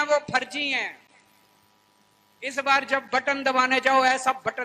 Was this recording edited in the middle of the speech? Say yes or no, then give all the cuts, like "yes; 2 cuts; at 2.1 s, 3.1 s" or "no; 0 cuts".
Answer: no; 0 cuts